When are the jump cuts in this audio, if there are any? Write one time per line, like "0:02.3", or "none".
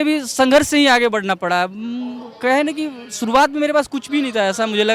none